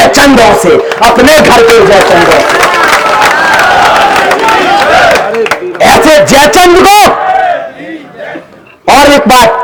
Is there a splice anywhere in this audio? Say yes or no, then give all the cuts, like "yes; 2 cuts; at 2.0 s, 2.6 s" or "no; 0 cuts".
no; 0 cuts